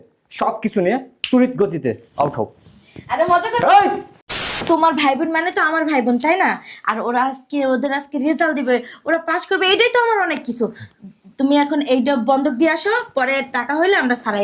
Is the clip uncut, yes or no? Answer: no